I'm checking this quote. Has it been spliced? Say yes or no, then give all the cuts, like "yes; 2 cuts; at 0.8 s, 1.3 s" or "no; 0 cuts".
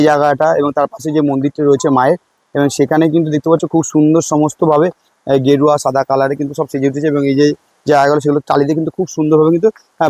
no; 0 cuts